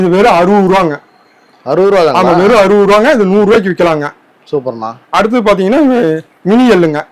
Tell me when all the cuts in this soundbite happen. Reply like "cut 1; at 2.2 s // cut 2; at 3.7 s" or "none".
none